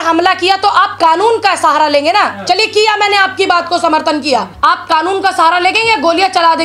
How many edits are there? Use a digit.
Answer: 1